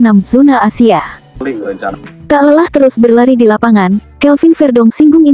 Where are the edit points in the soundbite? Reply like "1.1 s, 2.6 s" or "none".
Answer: 1.5 s